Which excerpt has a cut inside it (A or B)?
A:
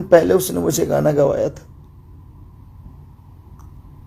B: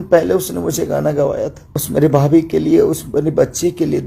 B